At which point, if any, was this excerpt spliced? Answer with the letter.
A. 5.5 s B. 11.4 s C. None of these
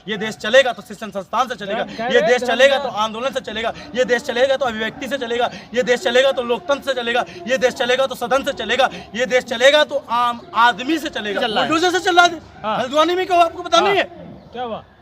B